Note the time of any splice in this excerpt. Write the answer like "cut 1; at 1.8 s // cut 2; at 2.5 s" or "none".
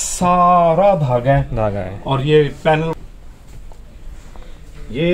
cut 1; at 2.9 s